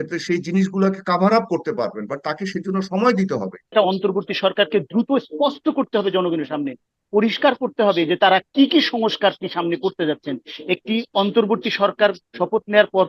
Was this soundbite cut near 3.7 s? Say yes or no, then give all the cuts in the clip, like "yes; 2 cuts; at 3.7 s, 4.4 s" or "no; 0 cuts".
yes; 1 cut; at 3.7 s